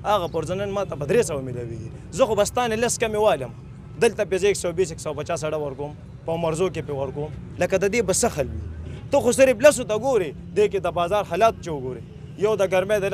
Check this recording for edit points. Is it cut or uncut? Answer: uncut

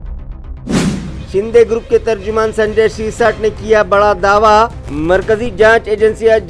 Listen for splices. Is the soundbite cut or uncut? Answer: cut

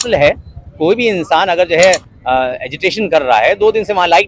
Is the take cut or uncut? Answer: uncut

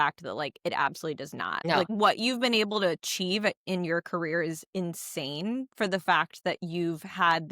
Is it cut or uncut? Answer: cut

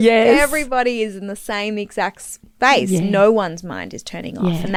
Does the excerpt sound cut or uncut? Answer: uncut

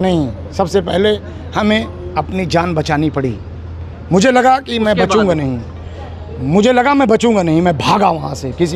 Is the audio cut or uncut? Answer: uncut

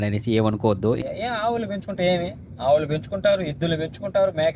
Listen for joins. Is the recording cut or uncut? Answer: cut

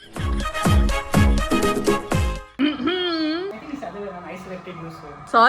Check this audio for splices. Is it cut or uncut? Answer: uncut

